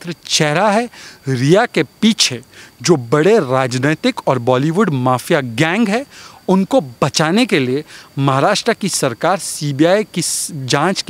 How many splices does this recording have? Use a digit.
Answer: 0